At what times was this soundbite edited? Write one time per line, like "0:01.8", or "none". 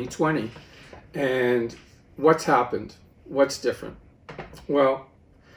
none